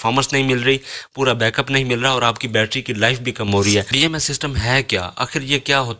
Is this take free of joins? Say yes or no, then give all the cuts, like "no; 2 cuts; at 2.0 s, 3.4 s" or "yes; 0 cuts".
no; 1 cut; at 3.9 s